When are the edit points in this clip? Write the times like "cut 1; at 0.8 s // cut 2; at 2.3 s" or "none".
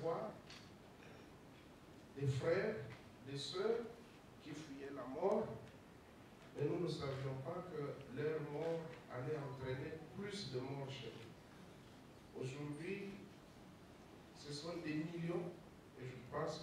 none